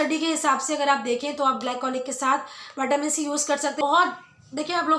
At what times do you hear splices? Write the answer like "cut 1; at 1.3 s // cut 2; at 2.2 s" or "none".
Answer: cut 1; at 3.8 s